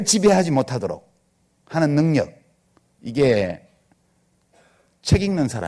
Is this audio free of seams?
yes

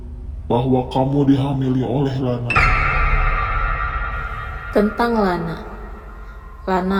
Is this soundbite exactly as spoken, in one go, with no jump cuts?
yes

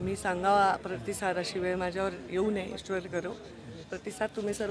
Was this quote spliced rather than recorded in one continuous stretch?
no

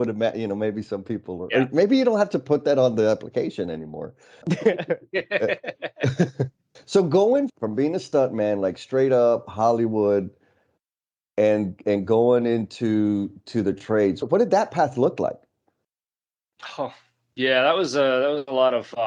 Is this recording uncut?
no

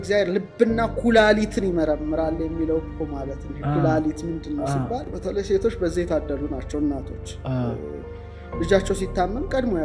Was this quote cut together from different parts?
yes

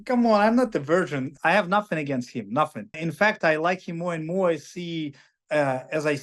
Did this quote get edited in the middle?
yes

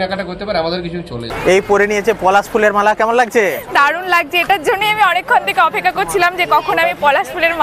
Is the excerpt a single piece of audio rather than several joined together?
no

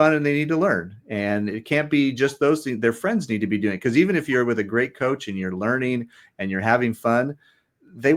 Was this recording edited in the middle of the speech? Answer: no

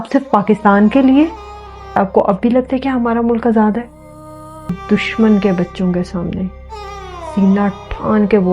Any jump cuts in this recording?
yes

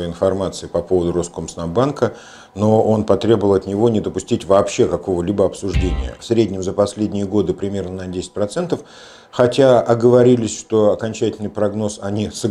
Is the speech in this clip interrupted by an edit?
yes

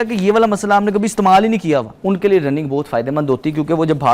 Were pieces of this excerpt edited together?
yes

